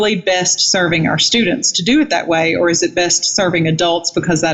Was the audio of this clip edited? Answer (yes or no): no